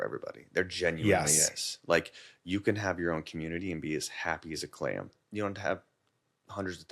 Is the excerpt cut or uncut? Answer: cut